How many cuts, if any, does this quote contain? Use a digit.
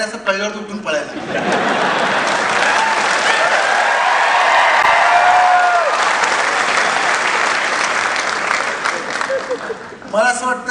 0